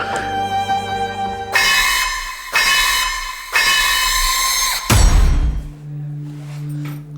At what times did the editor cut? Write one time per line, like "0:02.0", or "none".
0:05.6